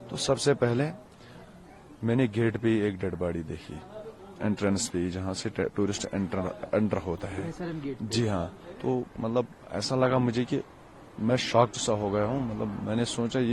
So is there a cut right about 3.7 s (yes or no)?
no